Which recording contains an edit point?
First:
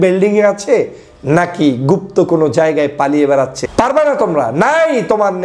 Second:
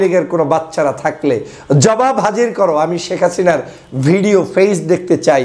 first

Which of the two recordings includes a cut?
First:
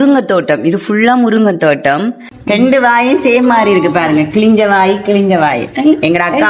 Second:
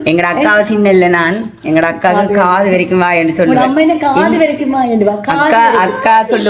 first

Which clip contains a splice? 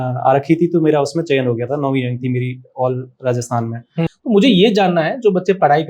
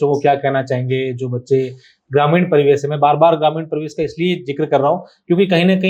first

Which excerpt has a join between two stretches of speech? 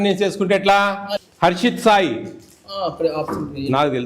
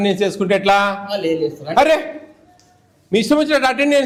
first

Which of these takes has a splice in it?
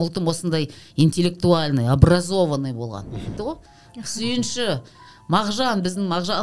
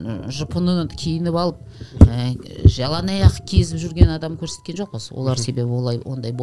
first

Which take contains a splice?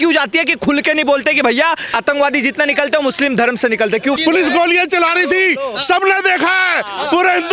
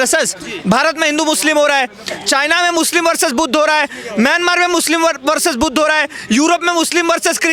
first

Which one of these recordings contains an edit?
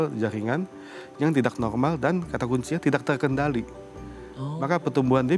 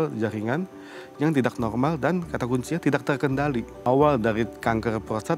second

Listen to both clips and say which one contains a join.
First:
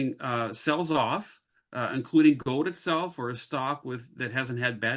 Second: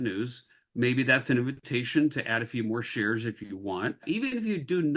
second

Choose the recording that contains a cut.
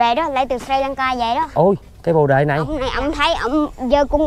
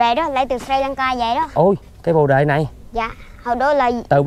first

